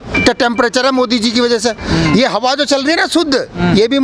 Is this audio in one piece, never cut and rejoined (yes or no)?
yes